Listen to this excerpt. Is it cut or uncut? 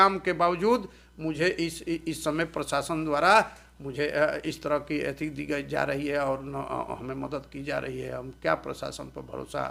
uncut